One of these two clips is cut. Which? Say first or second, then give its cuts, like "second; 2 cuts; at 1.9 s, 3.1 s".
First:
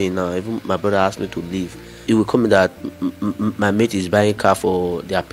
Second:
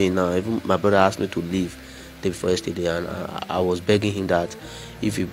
first; 1 cut; at 2.0 s